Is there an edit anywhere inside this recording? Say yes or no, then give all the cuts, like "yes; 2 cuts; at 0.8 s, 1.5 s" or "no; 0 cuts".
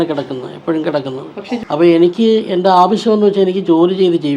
yes; 1 cut; at 1.6 s